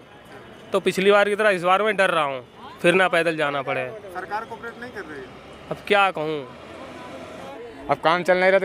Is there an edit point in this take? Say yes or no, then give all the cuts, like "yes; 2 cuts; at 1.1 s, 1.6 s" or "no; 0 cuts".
yes; 1 cut; at 7.5 s